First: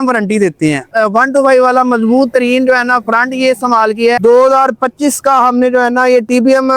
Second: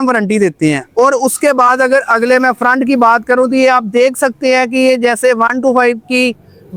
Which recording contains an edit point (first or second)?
first